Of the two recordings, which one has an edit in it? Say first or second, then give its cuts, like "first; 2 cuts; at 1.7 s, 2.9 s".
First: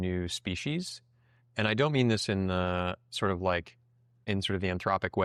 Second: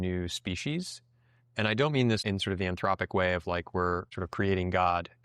second; 2 cuts; at 2.2 s, 4.2 s